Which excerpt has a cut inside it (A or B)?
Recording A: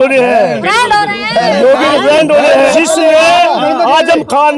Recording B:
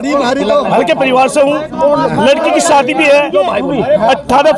A